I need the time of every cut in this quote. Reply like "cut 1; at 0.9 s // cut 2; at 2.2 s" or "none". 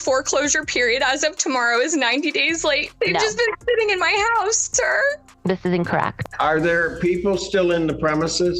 cut 1; at 2.9 s // cut 2; at 6.1 s